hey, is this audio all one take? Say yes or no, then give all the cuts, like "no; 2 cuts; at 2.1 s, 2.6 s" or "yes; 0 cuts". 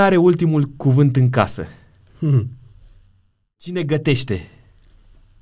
no; 1 cut; at 3.6 s